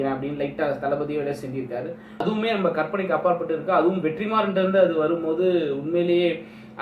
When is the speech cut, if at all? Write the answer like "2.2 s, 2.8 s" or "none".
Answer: 2.1 s